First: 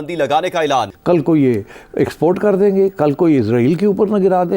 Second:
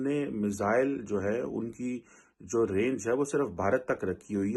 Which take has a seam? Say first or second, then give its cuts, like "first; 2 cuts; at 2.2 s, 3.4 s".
first; 1 cut; at 0.9 s